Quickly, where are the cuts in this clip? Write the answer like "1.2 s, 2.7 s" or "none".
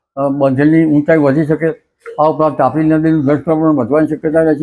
none